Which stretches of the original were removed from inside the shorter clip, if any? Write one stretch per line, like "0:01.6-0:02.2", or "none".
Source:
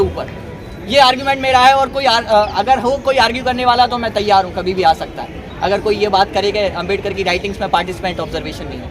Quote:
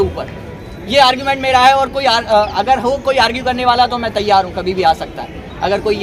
none